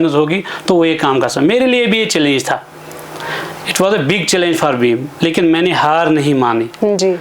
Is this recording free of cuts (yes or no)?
yes